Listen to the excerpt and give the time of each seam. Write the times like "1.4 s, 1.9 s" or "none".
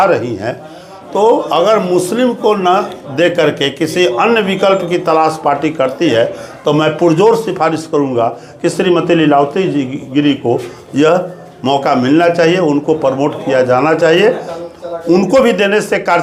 none